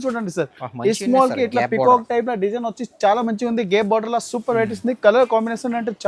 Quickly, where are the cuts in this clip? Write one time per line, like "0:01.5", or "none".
none